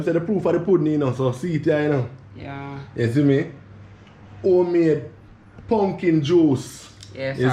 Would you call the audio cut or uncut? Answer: uncut